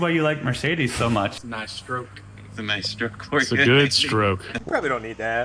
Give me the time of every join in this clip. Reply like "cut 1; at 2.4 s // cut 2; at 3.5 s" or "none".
cut 1; at 1.3 s // cut 2; at 4.5 s